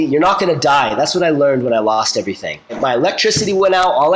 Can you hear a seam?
yes; 1 cut; at 2.8 s

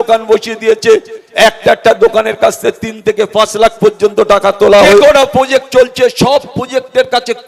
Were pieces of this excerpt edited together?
yes; 1 cut; at 5.0 s

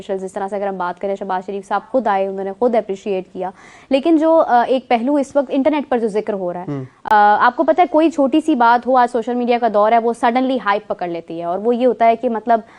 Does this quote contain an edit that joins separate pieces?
no; 0 cuts

